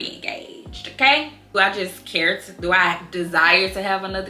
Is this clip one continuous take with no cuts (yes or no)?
no